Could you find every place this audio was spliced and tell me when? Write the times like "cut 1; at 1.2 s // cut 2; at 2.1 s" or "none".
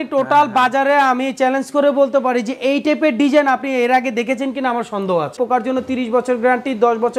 cut 1; at 5.4 s